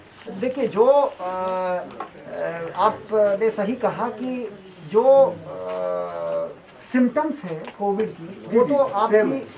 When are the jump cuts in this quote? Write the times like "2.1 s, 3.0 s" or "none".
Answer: none